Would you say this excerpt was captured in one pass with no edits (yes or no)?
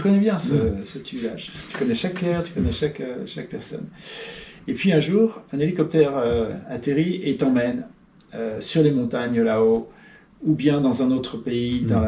yes